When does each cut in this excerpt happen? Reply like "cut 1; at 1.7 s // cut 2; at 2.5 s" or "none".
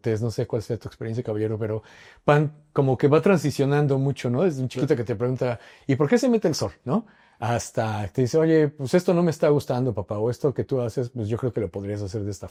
none